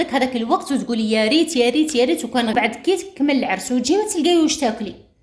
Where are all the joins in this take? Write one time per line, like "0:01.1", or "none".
0:02.5